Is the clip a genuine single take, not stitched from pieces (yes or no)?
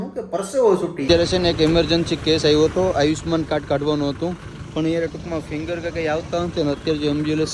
no